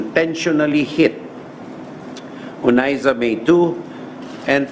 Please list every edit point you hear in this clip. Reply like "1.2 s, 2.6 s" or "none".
none